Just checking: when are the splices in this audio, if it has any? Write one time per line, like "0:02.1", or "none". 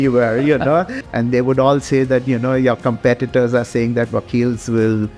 0:01.0